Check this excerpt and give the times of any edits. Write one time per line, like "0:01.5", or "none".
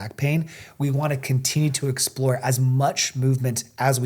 none